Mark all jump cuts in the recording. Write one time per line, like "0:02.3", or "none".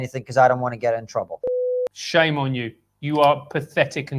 0:01.5